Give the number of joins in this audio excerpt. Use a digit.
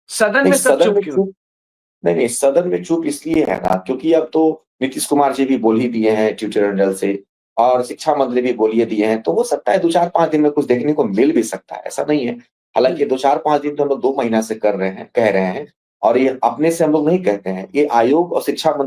0